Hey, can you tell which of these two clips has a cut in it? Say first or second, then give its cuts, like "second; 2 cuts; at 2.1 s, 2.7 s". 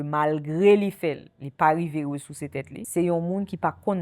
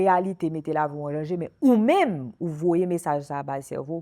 first; 1 cut; at 2.8 s